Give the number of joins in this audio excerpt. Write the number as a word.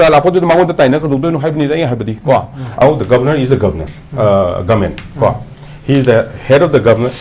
one